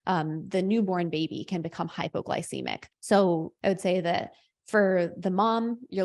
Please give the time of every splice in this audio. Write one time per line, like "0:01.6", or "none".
0:02.9
0:03.5

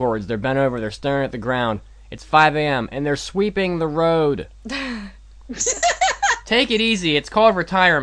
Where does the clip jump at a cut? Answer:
none

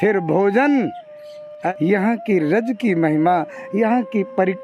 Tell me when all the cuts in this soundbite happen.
0:01.6

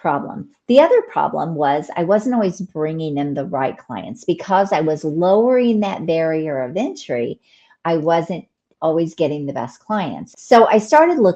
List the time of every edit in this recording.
0:10.2

